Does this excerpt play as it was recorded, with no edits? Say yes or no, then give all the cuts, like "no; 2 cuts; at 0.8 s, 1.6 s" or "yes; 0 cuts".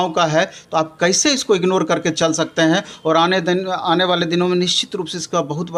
yes; 0 cuts